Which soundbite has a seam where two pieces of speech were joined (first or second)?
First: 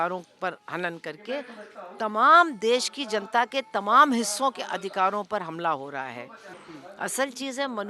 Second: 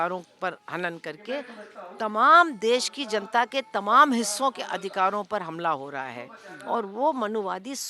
first